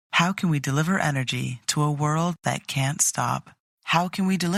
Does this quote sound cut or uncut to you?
uncut